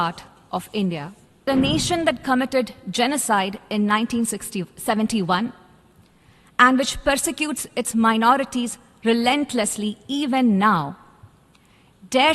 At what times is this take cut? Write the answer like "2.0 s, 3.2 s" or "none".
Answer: 1.5 s